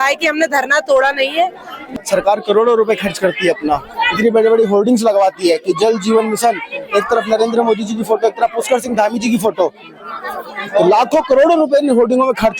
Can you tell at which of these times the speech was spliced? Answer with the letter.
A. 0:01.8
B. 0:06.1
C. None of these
A